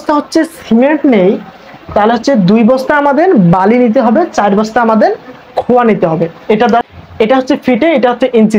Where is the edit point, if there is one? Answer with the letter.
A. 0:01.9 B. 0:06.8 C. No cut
B